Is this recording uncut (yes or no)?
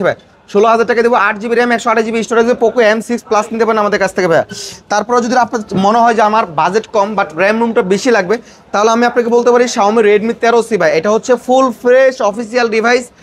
yes